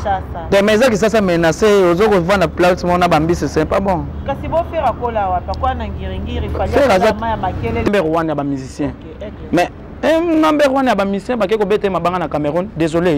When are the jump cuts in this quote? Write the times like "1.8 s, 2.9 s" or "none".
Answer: 7.9 s